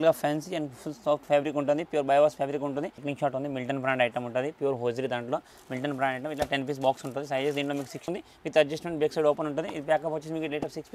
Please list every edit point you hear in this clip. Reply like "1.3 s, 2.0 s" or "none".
3.0 s, 8.0 s

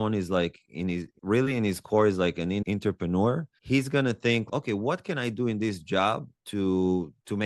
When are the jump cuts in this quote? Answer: none

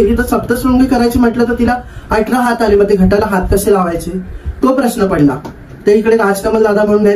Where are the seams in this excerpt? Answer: none

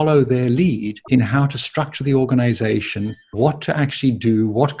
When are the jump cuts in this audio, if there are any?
0.9 s, 3.2 s

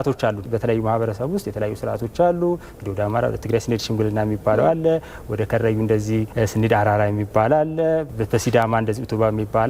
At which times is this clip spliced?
6.3 s

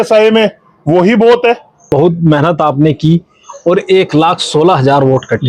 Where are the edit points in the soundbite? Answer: 1.8 s

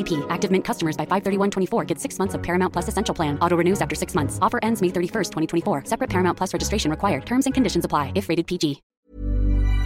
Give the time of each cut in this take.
8.9 s

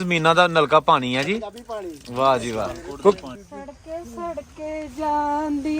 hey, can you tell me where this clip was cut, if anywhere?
2.8 s

